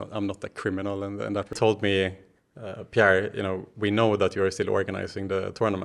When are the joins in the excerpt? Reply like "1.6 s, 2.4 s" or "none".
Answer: 1.5 s